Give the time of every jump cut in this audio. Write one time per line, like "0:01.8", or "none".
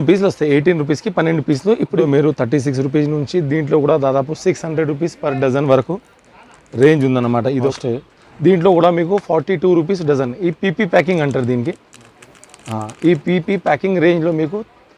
0:02.0
0:07.7